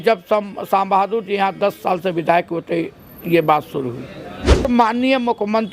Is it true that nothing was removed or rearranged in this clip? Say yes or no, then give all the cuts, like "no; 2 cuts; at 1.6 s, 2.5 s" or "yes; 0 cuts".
no; 1 cut; at 4.7 s